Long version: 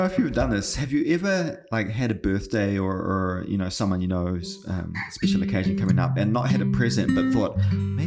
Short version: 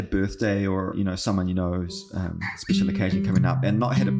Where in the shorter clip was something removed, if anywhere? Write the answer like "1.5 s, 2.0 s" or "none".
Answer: 0.9 s